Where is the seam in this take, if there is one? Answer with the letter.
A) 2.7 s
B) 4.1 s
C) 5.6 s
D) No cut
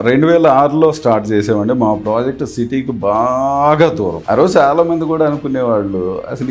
B